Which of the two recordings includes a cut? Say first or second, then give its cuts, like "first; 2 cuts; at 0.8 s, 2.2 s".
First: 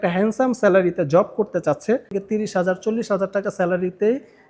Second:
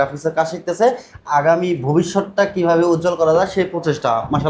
first; 1 cut; at 2.1 s